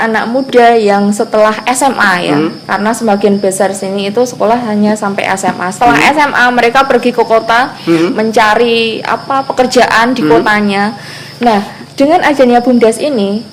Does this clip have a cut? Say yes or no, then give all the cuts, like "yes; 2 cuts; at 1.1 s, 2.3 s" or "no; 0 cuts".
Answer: no; 0 cuts